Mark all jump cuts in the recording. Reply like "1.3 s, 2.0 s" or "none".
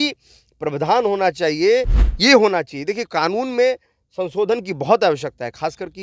2.0 s